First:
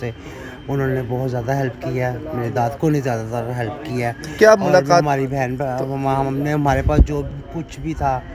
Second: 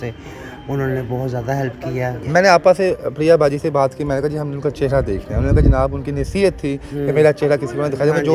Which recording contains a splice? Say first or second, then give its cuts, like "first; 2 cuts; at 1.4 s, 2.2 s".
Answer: second; 1 cut; at 2.2 s